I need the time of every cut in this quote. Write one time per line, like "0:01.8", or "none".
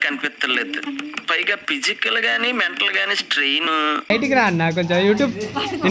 0:04.1